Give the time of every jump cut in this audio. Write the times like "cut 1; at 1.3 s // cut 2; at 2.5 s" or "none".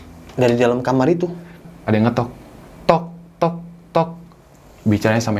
cut 1; at 1.6 s